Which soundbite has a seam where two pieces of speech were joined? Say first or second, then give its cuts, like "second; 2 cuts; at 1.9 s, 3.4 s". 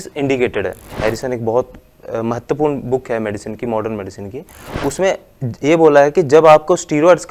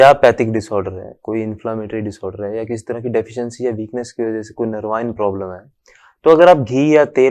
first; 1 cut; at 0.9 s